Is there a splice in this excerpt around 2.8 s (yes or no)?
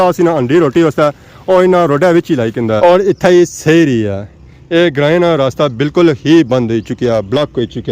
yes